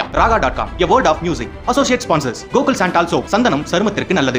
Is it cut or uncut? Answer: uncut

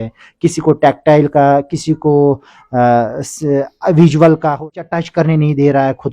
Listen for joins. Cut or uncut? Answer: cut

